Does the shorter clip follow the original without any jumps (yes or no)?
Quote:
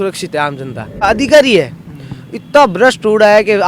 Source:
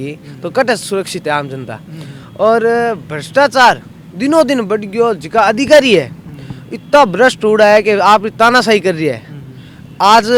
no